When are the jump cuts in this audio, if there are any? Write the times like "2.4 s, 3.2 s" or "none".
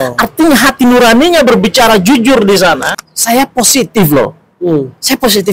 2.9 s